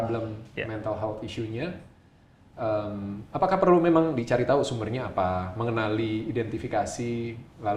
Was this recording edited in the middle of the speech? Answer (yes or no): no